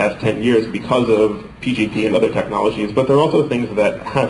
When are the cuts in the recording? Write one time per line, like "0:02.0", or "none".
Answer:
0:03.1